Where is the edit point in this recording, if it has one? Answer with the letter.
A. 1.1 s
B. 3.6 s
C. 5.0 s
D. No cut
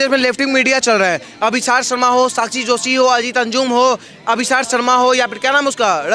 D